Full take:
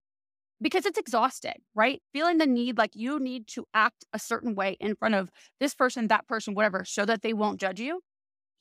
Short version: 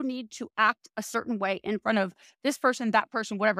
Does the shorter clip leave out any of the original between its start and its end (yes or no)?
no